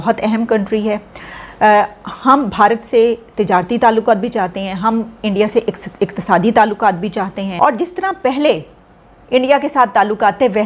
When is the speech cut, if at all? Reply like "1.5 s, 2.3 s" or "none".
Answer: 7.5 s